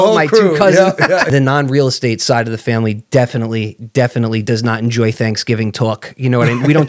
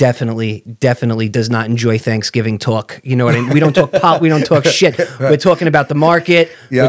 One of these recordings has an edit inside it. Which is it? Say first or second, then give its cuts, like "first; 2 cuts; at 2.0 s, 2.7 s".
first; 1 cut; at 1.3 s